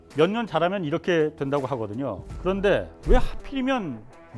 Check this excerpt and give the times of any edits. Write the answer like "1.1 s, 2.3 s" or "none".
none